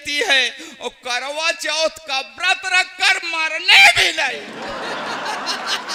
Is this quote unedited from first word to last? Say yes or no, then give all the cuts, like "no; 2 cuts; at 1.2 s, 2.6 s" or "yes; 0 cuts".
yes; 0 cuts